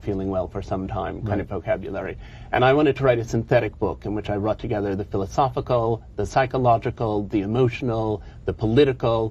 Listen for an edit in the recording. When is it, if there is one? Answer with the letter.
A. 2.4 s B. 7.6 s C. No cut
A